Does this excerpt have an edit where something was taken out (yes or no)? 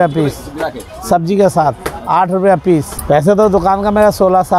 yes